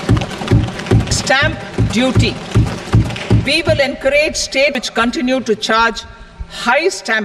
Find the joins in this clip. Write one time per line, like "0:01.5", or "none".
0:01.2
0:04.8